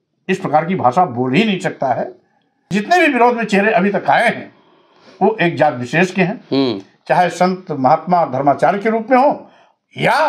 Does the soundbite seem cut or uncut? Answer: cut